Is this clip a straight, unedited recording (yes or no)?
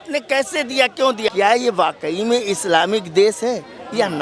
no